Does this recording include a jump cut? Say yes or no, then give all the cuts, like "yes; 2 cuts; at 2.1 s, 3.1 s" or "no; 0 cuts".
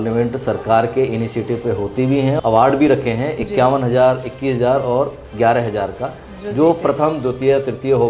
yes; 1 cut; at 2.4 s